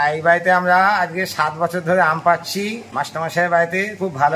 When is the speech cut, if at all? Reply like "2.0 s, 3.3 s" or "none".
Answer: 2.8 s